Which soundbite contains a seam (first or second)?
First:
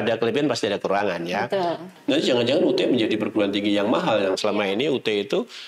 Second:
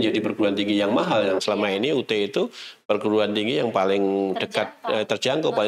first